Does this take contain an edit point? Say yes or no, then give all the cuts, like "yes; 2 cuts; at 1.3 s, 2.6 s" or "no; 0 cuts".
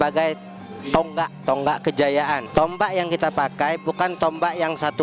yes; 2 cuts; at 1.4 s, 2.5 s